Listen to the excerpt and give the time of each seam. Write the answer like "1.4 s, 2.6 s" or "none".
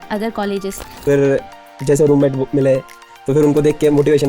0.9 s

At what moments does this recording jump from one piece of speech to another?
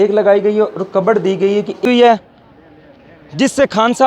1.8 s

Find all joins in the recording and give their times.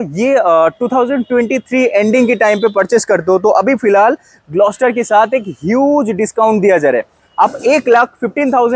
none

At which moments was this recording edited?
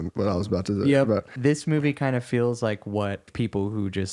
1.3 s

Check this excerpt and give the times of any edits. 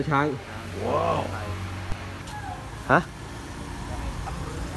2.2 s

